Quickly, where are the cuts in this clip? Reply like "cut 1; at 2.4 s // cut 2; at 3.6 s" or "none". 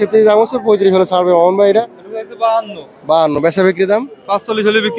cut 1; at 2.0 s